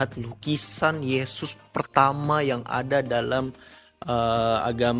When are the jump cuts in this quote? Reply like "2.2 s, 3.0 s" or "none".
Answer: none